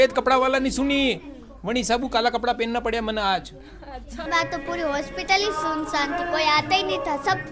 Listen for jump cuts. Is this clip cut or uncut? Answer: cut